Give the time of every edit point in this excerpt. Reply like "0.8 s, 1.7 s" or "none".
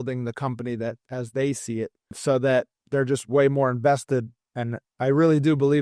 2.1 s, 4.8 s

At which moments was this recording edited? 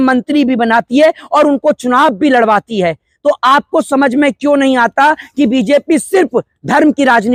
none

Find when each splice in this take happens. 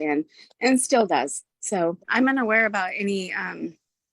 2.1 s

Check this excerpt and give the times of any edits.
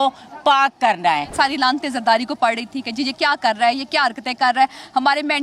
none

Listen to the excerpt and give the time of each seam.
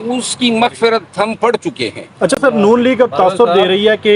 none

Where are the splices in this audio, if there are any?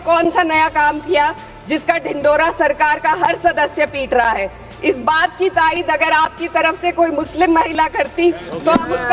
none

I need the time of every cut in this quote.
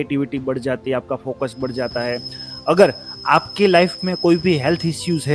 none

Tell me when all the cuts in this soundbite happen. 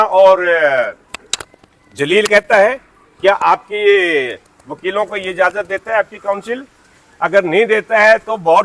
none

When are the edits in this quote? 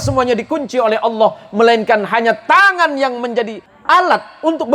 3.7 s

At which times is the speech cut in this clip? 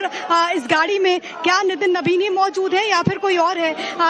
2.0 s

